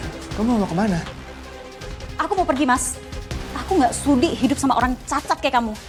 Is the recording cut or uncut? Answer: uncut